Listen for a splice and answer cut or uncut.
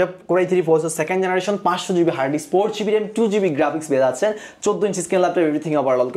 uncut